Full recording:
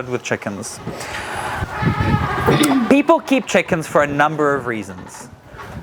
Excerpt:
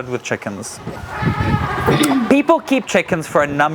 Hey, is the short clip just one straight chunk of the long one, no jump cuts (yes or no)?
no